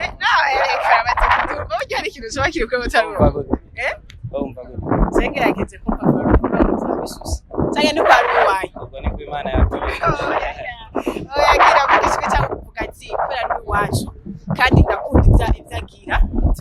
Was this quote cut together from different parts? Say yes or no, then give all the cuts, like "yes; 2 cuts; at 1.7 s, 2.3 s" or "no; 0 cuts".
no; 0 cuts